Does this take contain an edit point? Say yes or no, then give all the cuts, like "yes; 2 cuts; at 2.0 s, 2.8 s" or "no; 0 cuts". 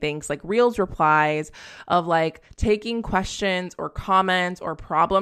no; 0 cuts